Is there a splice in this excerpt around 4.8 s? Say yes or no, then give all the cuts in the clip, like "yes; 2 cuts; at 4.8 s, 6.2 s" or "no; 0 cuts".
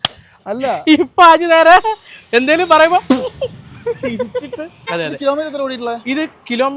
yes; 1 cut; at 4.8 s